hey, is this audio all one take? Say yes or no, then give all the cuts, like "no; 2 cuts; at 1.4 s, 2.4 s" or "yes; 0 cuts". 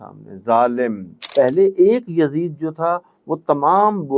no; 1 cut; at 1.2 s